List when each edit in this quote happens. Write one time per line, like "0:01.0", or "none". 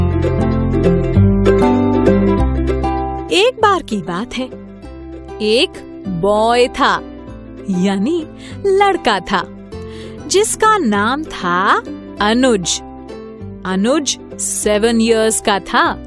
none